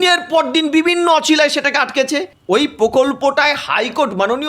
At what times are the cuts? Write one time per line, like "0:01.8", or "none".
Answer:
0:02.3